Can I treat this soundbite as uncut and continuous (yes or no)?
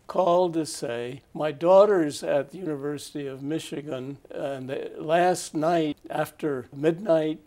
no